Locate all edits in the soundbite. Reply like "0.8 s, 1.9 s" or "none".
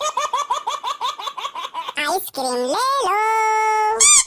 2.0 s